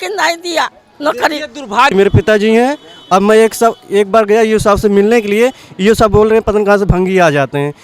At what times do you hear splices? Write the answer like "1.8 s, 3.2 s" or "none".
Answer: 1.9 s